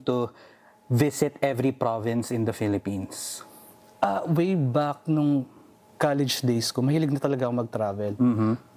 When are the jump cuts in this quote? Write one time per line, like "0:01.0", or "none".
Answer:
none